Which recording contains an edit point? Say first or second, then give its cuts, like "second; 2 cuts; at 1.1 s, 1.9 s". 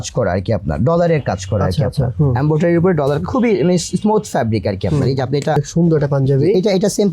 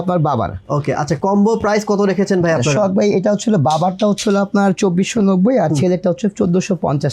first; 1 cut; at 5.7 s